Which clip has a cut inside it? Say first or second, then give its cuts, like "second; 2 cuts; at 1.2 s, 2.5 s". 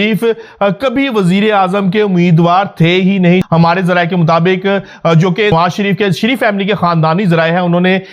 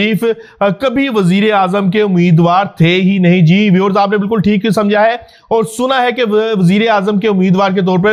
first; 2 cuts; at 3.4 s, 5.5 s